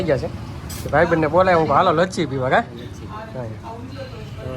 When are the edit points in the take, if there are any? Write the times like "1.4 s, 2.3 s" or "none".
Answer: none